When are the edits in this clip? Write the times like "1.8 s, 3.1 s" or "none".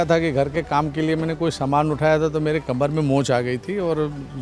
none